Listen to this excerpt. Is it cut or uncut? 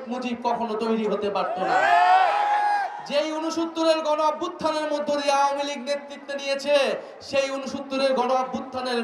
uncut